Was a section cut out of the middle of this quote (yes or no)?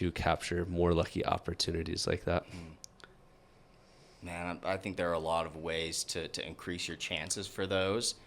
no